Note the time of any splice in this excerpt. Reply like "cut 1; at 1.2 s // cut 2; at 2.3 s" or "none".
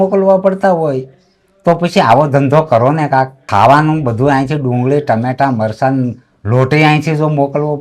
none